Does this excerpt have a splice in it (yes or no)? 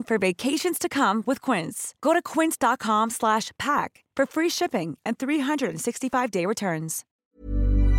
yes